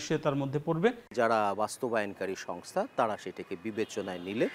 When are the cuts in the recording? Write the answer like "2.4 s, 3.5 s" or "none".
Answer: 1.1 s

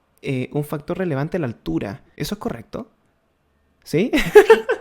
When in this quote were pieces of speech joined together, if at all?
2.2 s

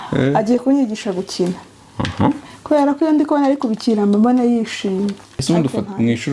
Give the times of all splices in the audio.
5.3 s

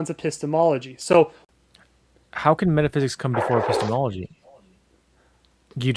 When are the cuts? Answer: 1.4 s

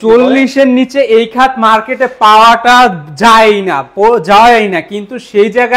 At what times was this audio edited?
none

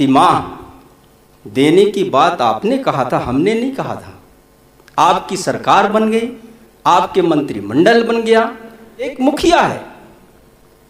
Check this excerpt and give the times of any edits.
9.1 s

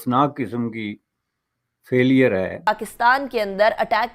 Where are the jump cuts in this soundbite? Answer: 2.7 s

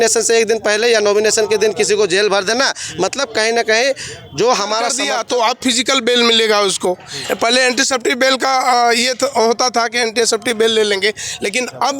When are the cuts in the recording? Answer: 5.1 s

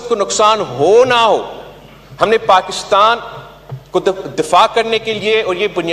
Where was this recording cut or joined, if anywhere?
none

